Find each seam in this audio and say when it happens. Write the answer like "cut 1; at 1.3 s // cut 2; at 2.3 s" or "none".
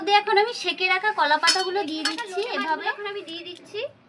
cut 1; at 2.9 s

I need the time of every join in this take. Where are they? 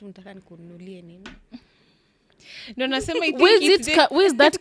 none

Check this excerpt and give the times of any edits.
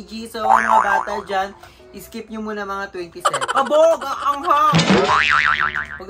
cut 1; at 3.4 s

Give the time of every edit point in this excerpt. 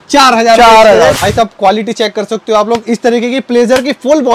cut 1; at 1.2 s

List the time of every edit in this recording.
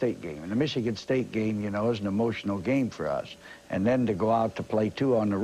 cut 1; at 4.0 s

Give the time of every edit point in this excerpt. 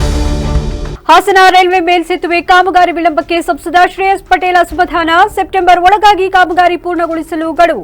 cut 1; at 0.9 s

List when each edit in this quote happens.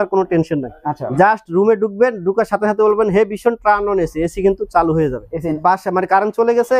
cut 1; at 5.6 s

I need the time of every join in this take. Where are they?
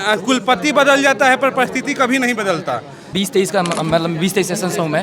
cut 1; at 3.0 s

